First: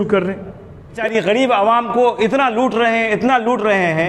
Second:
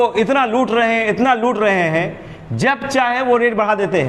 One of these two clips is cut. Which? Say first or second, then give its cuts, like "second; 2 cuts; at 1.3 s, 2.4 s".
first; 1 cut; at 0.9 s